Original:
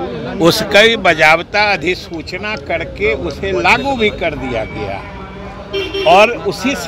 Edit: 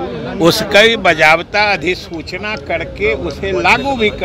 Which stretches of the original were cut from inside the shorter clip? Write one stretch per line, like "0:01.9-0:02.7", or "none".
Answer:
none